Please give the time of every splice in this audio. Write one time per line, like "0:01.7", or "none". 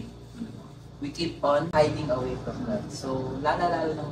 0:01.7